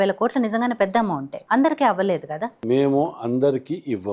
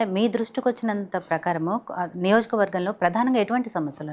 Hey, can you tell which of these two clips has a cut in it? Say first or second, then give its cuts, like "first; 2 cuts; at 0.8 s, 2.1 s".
first; 2 cuts; at 1.3 s, 2.6 s